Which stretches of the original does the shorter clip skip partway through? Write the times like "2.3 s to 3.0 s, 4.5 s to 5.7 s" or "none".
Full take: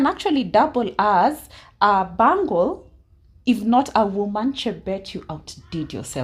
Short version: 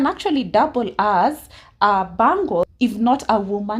2.7 s to 3.4 s